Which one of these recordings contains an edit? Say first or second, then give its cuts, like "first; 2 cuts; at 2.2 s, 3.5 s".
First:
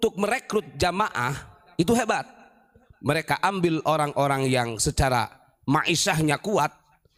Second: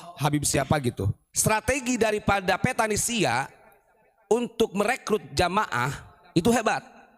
second; 1 cut; at 1.2 s